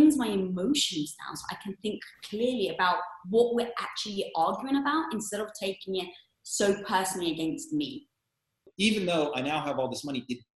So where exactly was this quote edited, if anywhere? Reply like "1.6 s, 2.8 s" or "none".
8.7 s